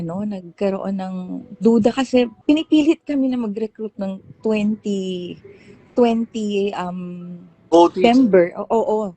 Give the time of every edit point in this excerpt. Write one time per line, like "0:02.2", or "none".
0:02.4